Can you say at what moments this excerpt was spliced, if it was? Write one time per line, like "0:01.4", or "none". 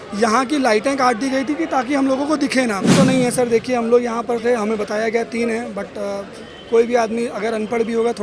0:02.9

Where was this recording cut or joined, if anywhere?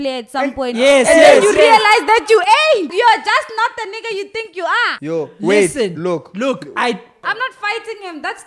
0:02.9
0:05.0
0:07.3

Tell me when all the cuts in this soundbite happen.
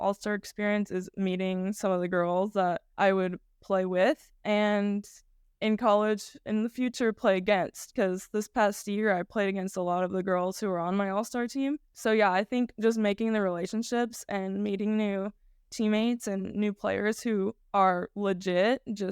0:02.9
0:06.4
0:11.9
0:17.6

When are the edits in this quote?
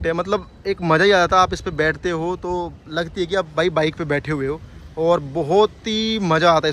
none

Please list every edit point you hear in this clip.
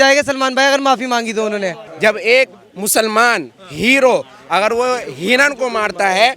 0:01.8

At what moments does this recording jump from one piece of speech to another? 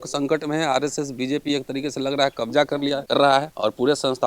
0:03.2

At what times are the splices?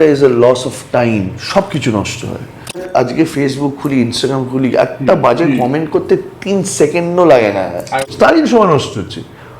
0:01.4
0:02.9
0:08.3

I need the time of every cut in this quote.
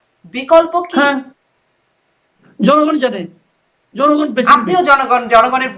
none

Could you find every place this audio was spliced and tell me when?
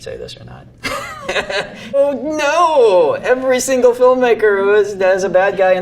0:02.0

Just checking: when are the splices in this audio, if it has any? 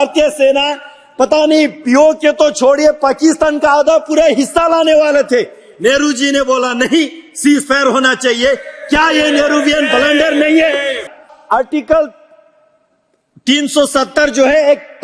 0:11.4

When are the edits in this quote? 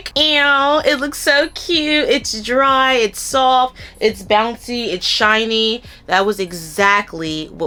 none

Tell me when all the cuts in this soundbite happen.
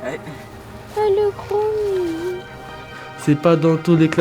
0:03.0

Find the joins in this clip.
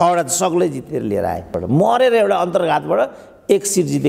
0:01.5

